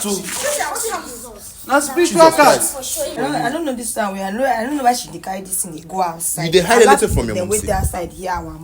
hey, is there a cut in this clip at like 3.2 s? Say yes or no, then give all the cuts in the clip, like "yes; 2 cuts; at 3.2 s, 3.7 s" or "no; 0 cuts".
yes; 1 cut; at 3.2 s